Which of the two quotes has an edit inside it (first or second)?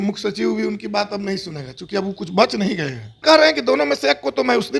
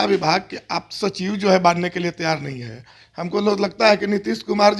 first